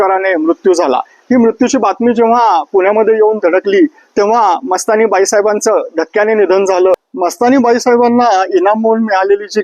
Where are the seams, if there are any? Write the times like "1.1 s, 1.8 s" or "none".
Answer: 7.0 s